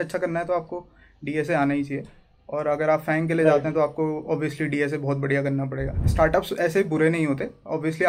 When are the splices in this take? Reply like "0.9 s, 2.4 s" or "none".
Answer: 6.1 s